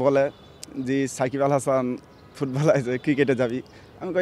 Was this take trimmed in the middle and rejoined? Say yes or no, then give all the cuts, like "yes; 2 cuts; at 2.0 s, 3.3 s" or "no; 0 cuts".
no; 0 cuts